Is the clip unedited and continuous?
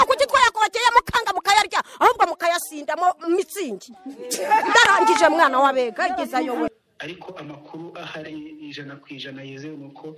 no; 1 cut; at 6.7 s

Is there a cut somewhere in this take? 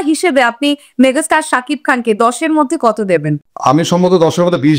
no; 0 cuts

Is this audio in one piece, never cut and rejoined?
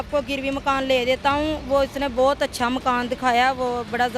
yes; 0 cuts

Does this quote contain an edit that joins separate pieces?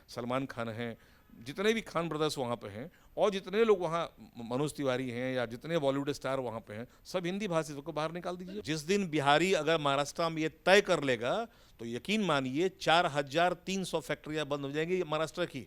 yes; 1 cut; at 8.6 s

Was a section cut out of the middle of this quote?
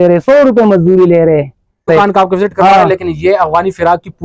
yes; 1 cut; at 1.9 s

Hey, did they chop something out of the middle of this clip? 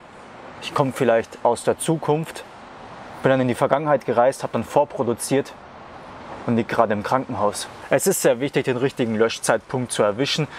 yes; 1 cut; at 7.7 s

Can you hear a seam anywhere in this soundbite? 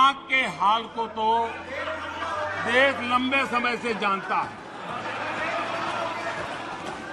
no; 0 cuts

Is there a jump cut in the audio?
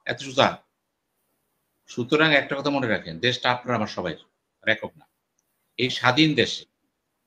no; 0 cuts

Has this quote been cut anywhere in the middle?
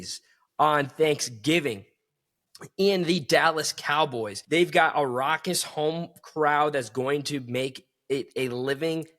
yes; 1 cut; at 4.3 s

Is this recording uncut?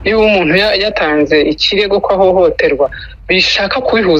no; 1 cut; at 0.9 s

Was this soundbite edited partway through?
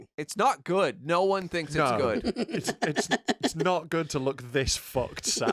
no; 0 cuts

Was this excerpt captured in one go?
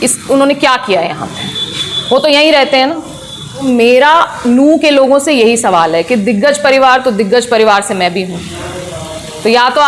no; 1 cut; at 3.6 s

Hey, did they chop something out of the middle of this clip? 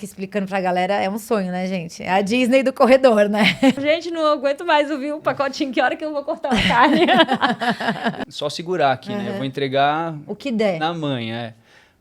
yes; 2 cuts; at 3.8 s, 8.2 s

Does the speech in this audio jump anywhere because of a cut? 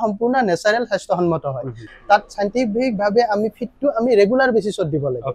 yes; 1 cut; at 1.8 s

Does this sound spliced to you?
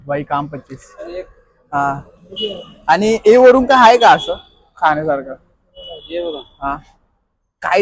no; 0 cuts

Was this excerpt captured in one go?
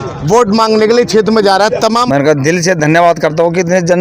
no; 1 cut; at 2.0 s

